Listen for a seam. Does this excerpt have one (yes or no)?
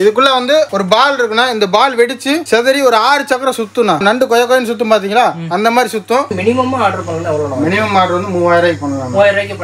yes